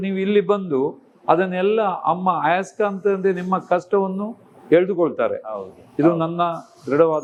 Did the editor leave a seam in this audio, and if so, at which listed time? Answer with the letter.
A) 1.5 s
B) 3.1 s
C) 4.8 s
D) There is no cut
D